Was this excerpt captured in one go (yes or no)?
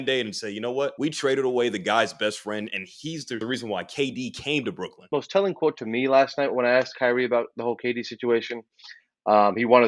no